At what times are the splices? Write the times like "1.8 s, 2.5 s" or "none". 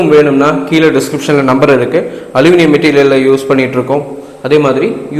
none

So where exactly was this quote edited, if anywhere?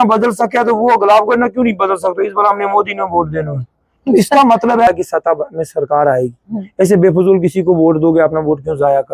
4.9 s

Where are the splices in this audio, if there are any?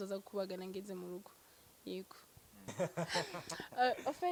none

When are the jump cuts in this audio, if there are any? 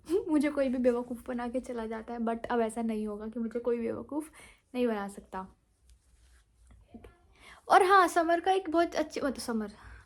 none

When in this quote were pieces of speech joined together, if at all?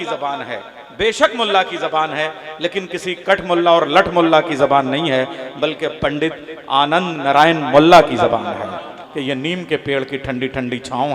9.0 s

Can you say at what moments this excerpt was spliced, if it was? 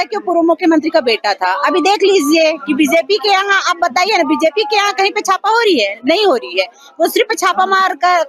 none

